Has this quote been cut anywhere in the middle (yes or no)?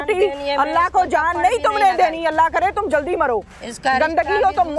no